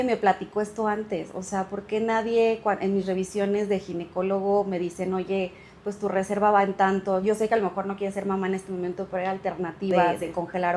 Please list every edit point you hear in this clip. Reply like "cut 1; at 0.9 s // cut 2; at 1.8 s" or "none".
none